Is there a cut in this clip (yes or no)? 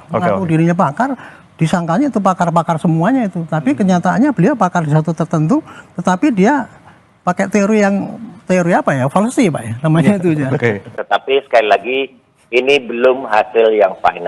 yes